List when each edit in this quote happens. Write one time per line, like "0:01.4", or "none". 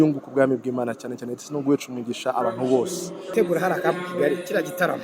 0:03.3